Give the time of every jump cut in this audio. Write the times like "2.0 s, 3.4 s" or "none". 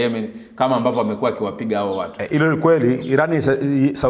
2.2 s